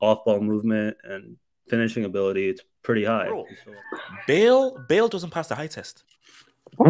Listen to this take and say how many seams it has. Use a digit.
1